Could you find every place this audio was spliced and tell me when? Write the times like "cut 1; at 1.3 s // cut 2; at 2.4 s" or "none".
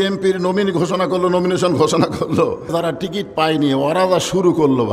cut 1; at 2.7 s